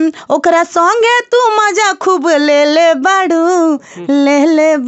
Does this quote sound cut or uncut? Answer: uncut